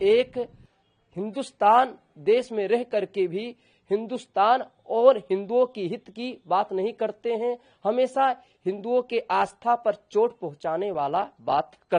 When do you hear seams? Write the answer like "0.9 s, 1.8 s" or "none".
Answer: none